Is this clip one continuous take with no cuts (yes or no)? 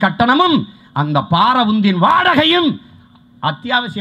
yes